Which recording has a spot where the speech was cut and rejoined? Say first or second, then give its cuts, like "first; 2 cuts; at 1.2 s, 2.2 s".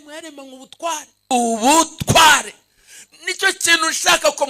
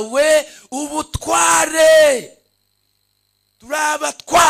first; 1 cut; at 1.3 s